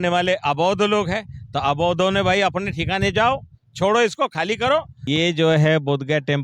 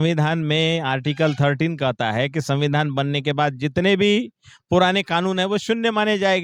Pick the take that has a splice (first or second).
first